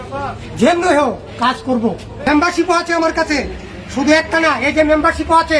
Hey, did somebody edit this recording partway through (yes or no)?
yes